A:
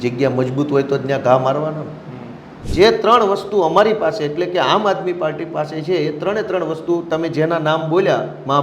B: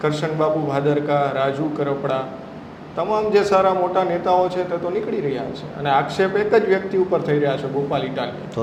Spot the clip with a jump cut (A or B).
A